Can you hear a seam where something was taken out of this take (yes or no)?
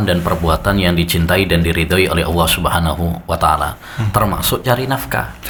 no